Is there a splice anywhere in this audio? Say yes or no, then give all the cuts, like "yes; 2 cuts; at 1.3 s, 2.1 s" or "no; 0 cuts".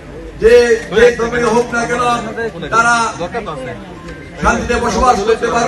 no; 0 cuts